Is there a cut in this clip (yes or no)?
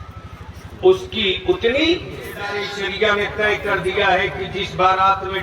yes